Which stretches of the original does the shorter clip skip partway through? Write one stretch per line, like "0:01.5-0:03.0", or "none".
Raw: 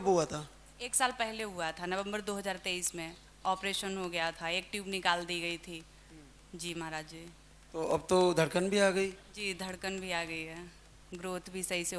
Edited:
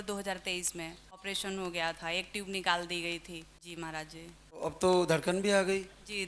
0:03.4-0:03.6
0:06.0-0:06.6
0:07.6-0:07.9